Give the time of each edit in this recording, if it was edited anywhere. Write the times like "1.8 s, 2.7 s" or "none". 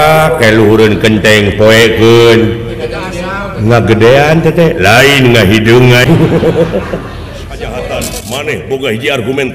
6.0 s, 8.1 s